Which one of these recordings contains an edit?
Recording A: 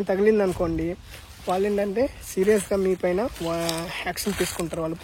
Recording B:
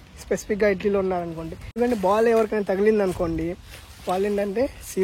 B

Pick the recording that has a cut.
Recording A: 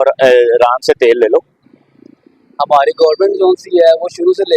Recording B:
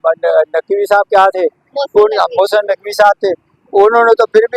A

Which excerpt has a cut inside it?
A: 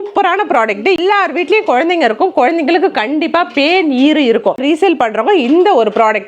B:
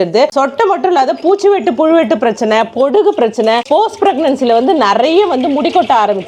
A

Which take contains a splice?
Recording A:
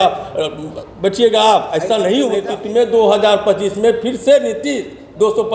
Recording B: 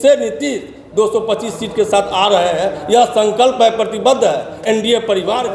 A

